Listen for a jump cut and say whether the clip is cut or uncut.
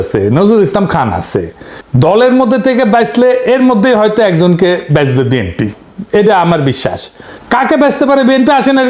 uncut